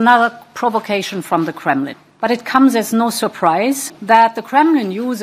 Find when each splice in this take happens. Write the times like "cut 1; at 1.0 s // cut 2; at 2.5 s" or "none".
cut 1; at 2.0 s // cut 2; at 3.9 s